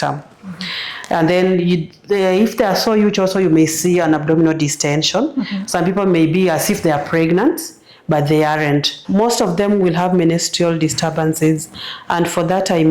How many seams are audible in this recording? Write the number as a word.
one